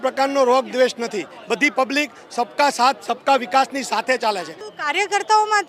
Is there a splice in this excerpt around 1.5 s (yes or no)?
no